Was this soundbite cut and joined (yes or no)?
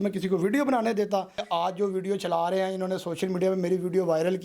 yes